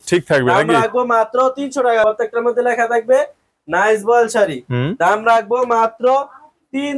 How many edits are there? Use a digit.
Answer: 1